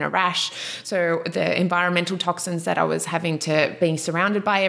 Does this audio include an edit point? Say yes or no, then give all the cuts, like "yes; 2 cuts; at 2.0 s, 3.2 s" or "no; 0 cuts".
yes; 1 cut; at 3.7 s